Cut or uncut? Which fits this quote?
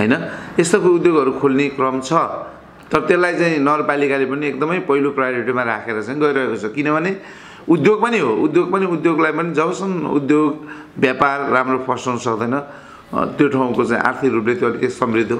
uncut